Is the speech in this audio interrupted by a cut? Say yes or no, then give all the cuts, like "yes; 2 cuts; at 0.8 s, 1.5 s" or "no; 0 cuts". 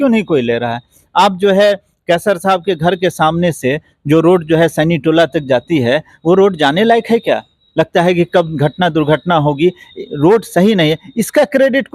no; 0 cuts